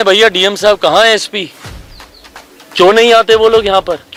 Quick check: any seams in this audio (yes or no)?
no